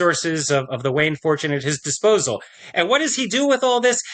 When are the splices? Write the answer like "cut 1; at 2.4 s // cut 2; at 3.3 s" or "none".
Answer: cut 1; at 2.6 s